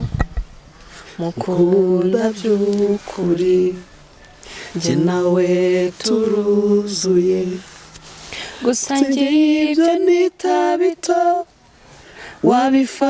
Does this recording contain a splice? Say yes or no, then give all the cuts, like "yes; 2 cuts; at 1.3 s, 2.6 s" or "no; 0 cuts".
no; 0 cuts